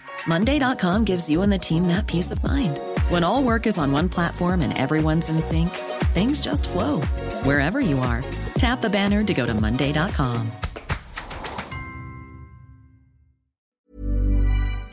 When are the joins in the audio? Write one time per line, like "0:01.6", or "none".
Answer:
0:13.8